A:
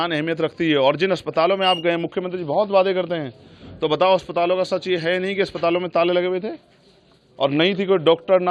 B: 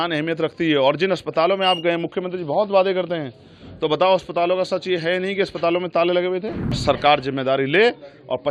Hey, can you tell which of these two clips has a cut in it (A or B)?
B